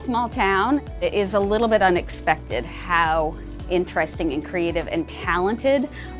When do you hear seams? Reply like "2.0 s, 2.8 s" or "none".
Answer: 0.9 s